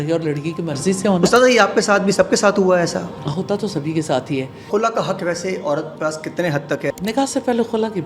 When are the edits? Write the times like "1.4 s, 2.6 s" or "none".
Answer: 3.1 s, 4.7 s, 6.9 s

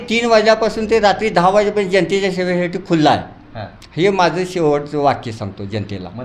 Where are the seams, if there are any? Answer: none

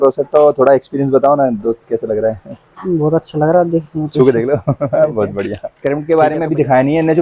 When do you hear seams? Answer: 5.7 s

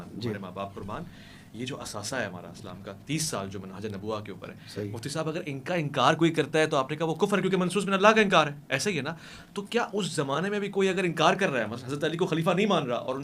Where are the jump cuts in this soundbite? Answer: none

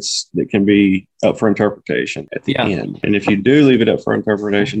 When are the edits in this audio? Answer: 2.3 s, 3.0 s

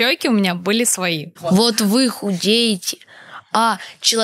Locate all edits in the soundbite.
1.3 s

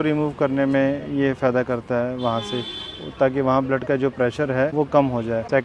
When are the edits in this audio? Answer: none

